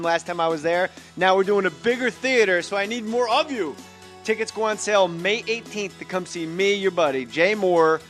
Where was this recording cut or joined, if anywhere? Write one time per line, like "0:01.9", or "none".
0:04.2